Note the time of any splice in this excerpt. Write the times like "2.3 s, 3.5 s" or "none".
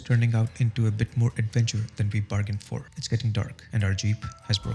2.9 s, 3.6 s